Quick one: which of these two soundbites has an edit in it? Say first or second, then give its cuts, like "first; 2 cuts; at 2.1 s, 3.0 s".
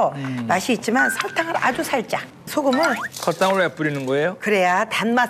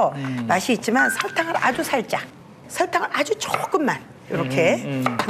first; 1 cut; at 2.4 s